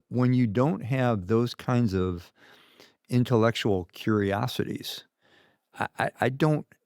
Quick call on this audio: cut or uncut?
uncut